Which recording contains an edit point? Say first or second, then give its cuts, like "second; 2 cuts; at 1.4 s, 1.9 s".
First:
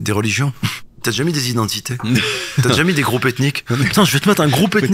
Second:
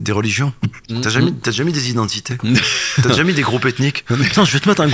first; 1 cut; at 1.0 s